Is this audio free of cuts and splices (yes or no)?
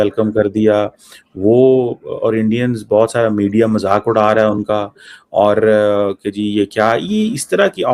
yes